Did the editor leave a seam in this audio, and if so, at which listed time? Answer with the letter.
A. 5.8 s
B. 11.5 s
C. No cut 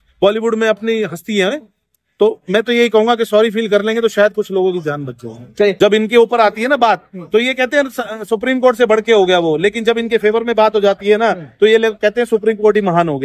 A